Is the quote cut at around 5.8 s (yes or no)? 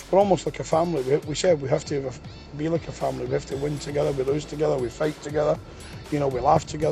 no